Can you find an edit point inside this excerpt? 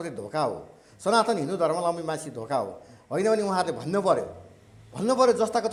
no; 0 cuts

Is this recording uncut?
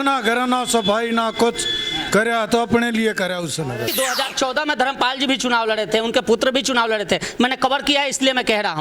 no; 1 cut; at 3.9 s

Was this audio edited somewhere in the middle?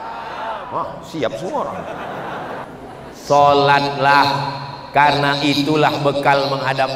yes; 1 cut; at 2.6 s

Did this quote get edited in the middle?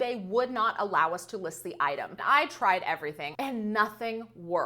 yes; 2 cuts; at 2.2 s, 3.2 s

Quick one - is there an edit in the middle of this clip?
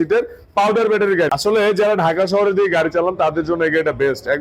yes; 1 cut; at 1.3 s

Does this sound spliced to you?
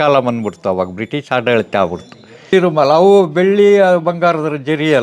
yes; 1 cut; at 2.5 s

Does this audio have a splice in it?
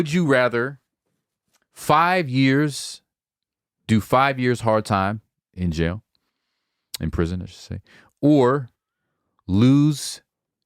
no; 0 cuts

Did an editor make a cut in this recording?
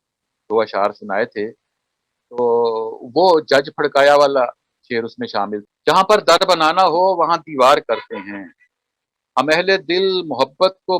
yes; 1 cut; at 5.6 s

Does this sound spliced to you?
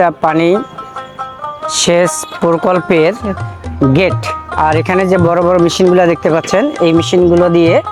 no; 0 cuts

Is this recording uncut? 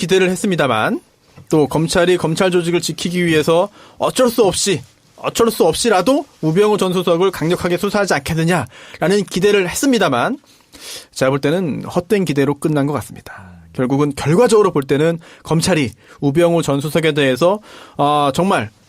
no; 1 cut; at 3.3 s

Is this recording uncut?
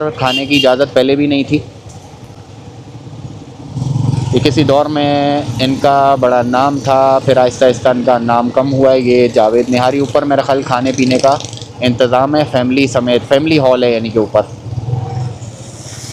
yes; 0 cuts

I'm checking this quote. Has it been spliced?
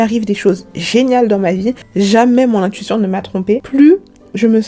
yes; 1 cut; at 1.8 s

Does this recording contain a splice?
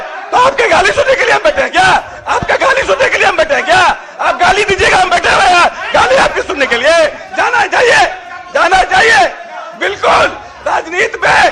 no; 0 cuts

